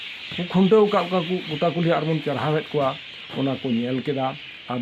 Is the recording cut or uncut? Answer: uncut